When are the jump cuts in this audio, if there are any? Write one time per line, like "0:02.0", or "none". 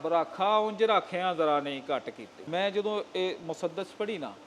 none